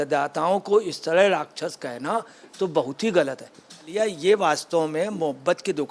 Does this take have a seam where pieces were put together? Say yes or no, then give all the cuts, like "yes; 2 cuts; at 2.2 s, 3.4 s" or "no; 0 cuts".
yes; 1 cut; at 3.9 s